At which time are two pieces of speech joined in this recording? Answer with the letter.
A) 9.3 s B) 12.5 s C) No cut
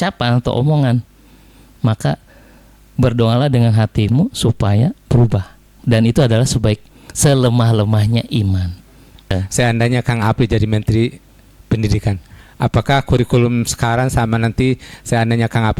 A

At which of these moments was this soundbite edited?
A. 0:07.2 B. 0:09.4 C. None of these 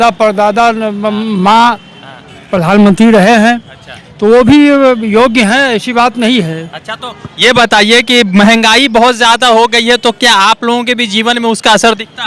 C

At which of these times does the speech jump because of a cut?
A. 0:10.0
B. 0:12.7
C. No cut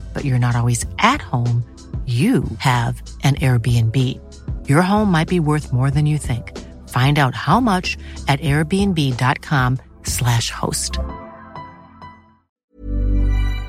B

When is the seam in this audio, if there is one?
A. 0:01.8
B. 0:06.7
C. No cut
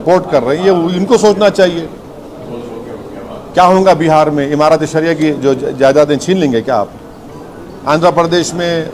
C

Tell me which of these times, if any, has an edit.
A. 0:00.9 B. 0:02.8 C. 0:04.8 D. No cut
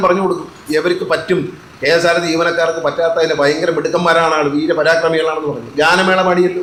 D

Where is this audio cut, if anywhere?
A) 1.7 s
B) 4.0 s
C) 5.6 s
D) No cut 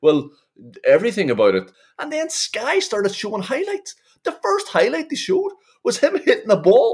A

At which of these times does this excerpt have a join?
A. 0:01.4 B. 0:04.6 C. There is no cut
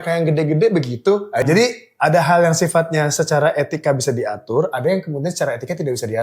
A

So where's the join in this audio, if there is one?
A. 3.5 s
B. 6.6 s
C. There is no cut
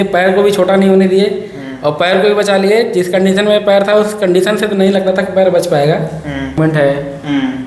B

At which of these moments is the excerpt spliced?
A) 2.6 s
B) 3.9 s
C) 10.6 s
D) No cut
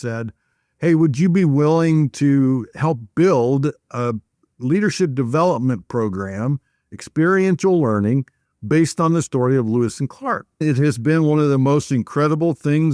C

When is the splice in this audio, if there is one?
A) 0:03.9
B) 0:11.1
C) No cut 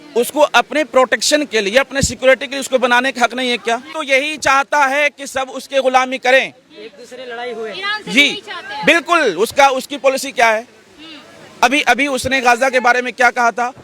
A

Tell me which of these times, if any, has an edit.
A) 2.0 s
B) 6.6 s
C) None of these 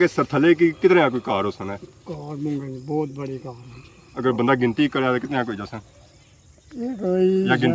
C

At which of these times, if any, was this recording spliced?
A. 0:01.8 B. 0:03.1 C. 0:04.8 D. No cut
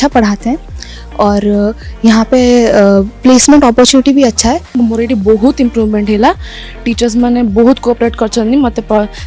C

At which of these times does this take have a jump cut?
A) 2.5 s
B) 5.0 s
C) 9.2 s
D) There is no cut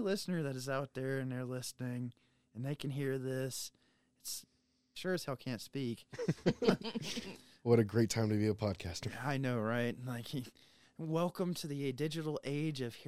B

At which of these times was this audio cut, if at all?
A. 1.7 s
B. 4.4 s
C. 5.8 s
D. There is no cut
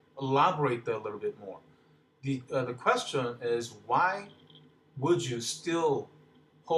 D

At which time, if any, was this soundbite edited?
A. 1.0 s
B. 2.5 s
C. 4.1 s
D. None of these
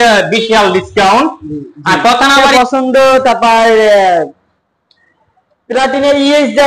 B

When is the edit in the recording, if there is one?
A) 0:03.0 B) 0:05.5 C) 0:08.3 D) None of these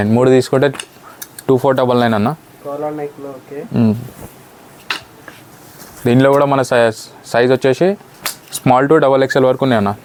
D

